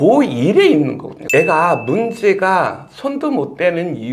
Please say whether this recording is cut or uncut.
cut